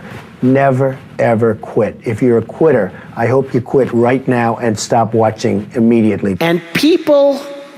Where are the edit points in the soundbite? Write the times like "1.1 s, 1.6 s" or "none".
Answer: 6.4 s